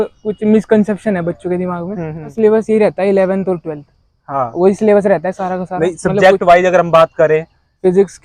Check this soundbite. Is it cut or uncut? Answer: cut